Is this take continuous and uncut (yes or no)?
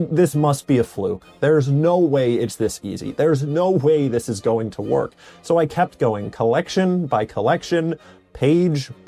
yes